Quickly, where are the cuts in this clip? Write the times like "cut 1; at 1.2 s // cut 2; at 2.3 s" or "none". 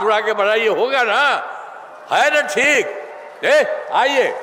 none